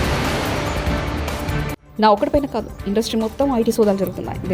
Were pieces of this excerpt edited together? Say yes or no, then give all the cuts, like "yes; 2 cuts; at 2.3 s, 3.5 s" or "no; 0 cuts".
no; 0 cuts